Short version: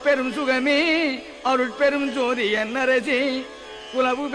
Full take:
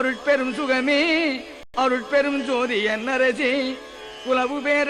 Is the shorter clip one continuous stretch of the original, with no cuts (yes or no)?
no